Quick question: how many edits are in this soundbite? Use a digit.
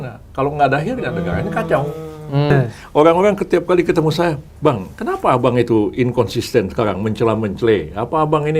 1